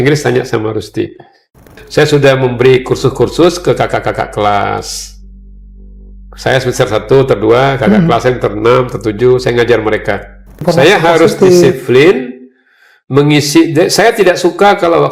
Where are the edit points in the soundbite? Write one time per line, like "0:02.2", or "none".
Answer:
0:01.8
0:10.6